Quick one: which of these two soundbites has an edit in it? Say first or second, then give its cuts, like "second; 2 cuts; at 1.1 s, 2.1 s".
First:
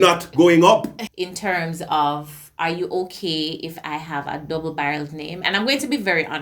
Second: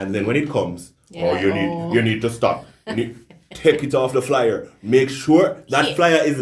first; 1 cut; at 1.0 s